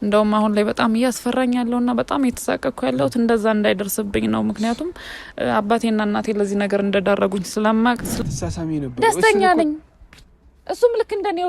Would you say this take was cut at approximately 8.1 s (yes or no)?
yes